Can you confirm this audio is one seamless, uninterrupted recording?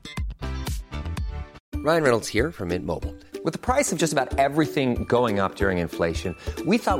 no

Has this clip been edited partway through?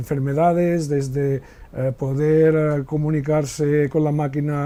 no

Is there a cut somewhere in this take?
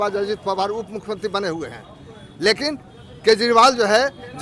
no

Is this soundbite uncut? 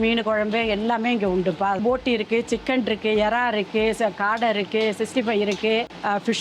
no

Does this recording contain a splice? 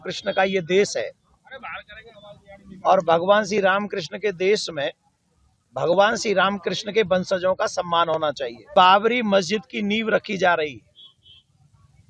yes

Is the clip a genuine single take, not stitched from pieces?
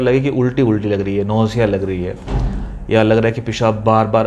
yes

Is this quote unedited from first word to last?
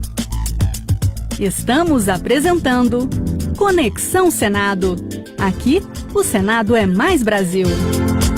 yes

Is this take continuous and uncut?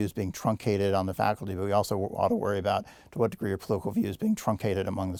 yes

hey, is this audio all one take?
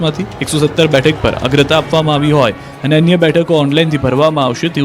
yes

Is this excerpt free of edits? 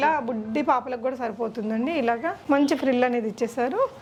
yes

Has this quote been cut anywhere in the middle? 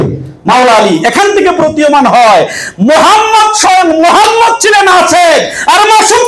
no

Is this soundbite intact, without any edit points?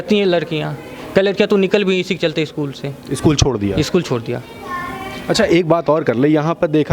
yes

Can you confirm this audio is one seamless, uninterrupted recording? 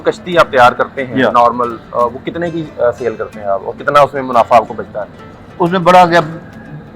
yes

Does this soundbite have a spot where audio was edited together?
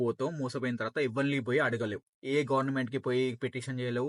no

